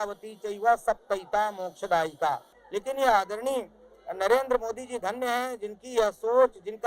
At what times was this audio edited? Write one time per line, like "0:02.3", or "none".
0:02.5